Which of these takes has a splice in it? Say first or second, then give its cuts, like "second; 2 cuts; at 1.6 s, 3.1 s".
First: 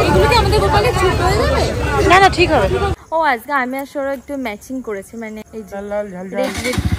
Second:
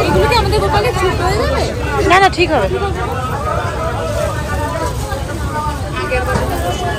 first; 2 cuts; at 3.0 s, 5.4 s